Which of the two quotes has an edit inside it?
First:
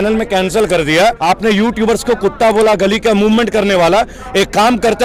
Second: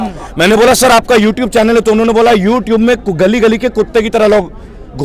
first; 1 cut; at 1.2 s

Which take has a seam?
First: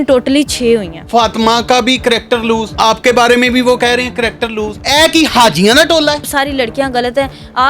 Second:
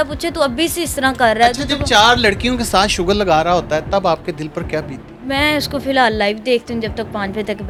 first; 4 cuts; at 1.0 s, 2.7 s, 4.8 s, 6.3 s

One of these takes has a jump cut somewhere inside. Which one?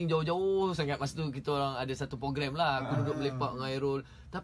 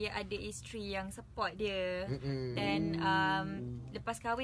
second; 1 cut; at 1.2 s

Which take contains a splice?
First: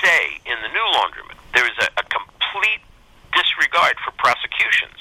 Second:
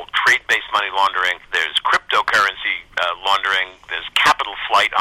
first; 1 cut; at 1.3 s

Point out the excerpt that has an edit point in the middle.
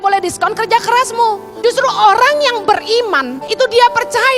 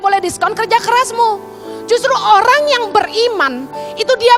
first; 2 cuts; at 1.5 s, 3.4 s

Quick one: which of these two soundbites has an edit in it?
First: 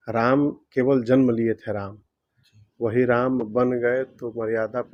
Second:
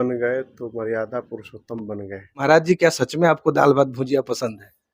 second; 1 cut; at 2.4 s

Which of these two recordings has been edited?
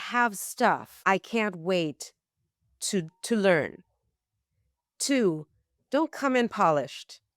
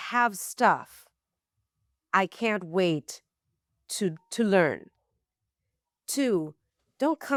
first; 1 cut; at 0.9 s

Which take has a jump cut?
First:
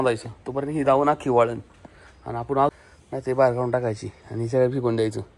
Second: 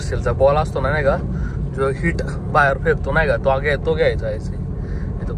first; 1 cut; at 2.7 s

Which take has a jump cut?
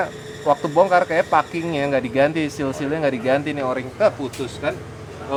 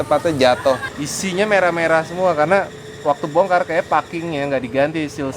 second; 1 cut; at 1.0 s

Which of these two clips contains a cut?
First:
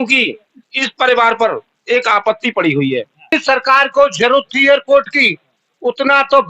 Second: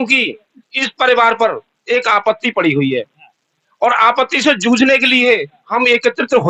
first; 1 cut; at 3.3 s

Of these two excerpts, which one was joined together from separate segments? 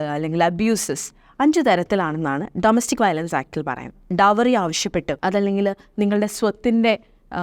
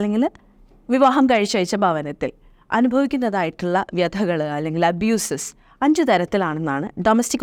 first; 2 cuts; at 4.1 s, 5.2 s

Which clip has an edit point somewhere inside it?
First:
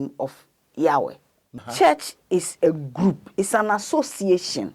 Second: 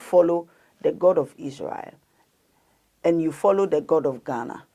first; 1 cut; at 1.4 s

